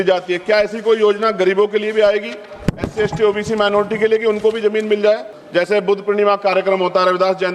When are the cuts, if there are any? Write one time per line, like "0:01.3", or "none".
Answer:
0:05.3